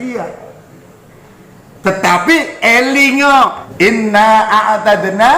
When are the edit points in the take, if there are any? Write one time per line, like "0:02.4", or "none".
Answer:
0:03.6